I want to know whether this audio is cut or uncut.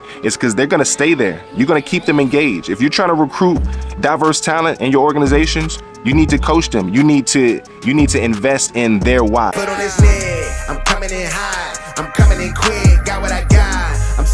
cut